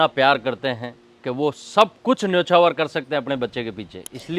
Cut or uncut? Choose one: uncut